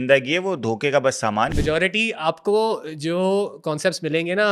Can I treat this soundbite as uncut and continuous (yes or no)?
no